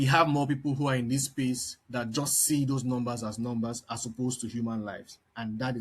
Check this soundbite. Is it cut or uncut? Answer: uncut